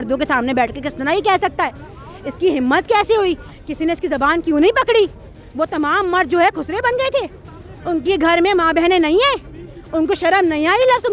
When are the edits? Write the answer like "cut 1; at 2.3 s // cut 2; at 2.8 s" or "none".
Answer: none